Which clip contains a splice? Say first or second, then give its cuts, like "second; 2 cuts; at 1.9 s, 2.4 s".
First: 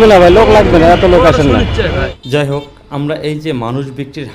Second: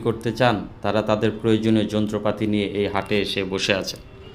first; 1 cut; at 2.1 s